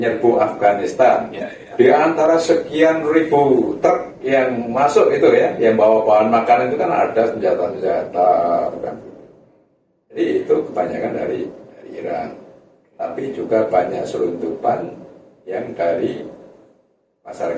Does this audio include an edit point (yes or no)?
yes